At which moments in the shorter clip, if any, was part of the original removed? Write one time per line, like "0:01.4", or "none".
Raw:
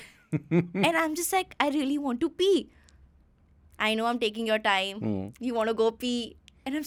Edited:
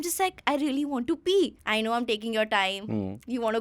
0:01.6